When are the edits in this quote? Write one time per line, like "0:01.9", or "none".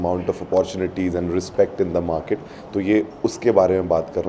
none